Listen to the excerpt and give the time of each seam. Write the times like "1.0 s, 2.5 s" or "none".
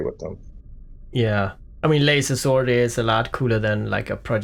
none